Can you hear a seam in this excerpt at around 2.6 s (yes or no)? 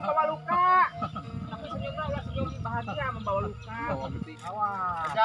no